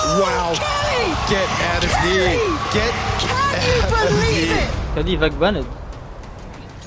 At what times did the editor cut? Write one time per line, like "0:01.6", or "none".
0:04.8